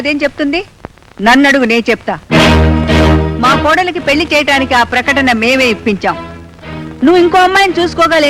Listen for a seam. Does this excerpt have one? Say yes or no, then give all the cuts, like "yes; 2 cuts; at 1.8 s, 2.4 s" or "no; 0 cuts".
no; 0 cuts